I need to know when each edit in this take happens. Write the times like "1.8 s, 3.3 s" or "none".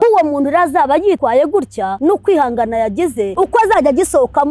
none